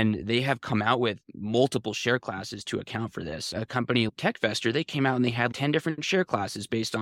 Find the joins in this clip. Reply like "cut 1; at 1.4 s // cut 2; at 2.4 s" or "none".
cut 1; at 4.1 s // cut 2; at 5.5 s